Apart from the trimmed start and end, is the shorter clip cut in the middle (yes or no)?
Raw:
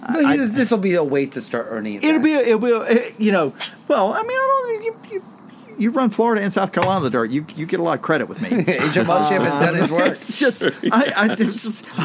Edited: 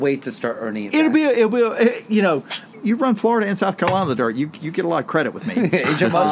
yes